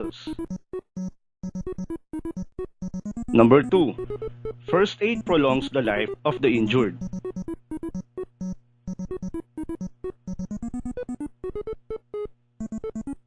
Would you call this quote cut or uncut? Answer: cut